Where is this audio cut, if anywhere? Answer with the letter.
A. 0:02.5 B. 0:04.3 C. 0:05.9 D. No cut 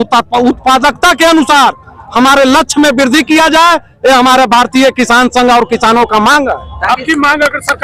D